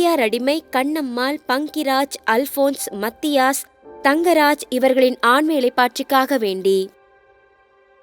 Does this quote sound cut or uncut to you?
cut